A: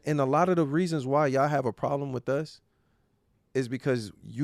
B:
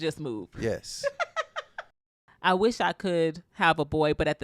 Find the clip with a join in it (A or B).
B